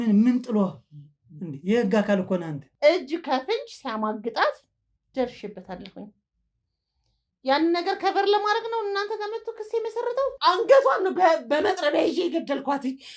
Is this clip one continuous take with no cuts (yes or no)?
no